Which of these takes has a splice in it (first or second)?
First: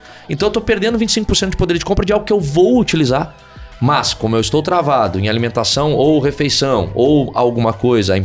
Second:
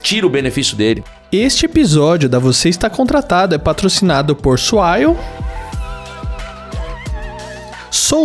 second